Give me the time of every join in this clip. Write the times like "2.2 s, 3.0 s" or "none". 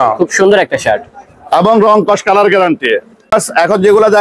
3.2 s